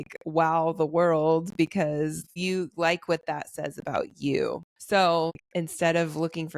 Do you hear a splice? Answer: yes; 3 cuts; at 2.3 s, 4.7 s, 5.4 s

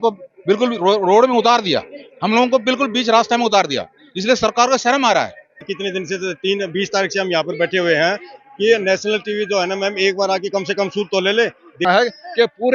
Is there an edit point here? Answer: yes; 2 cuts; at 5.7 s, 11.8 s

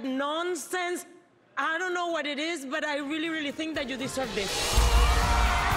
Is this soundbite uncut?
no; 1 cut; at 2.7 s

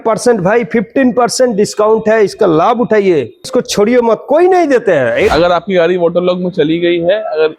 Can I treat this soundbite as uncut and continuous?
no; 1 cut; at 5.3 s

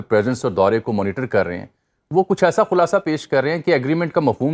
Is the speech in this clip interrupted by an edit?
no; 0 cuts

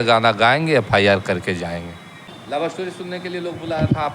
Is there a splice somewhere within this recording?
yes; 1 cut; at 2.4 s

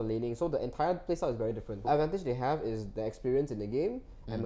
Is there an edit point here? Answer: yes; 1 cut; at 1.8 s

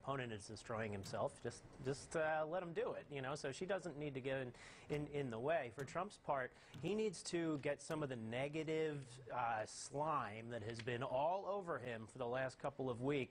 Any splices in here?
yes; 1 cut; at 3.1 s

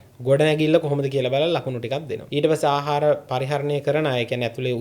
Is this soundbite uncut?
no; 1 cut; at 2.2 s

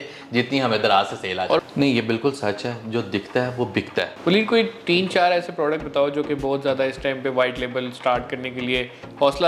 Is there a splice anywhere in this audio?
yes; 2 cuts; at 1.6 s, 4.1 s

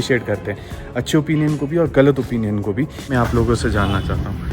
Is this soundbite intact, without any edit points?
no; 1 cut; at 3.0 s

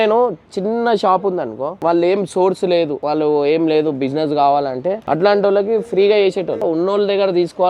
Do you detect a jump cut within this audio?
yes; 4 cuts; at 1.8 s, 3.0 s, 5.0 s, 6.6 s

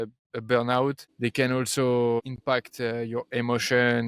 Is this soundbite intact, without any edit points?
no; 2 cuts; at 1.1 s, 2.2 s

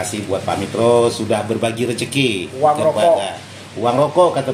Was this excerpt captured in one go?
yes; 0 cuts

